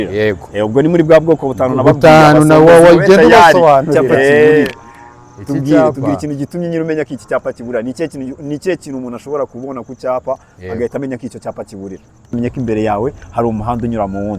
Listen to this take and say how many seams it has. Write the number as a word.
two